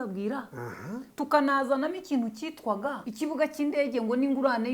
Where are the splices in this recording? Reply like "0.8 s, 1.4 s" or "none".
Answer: 1.1 s, 3.0 s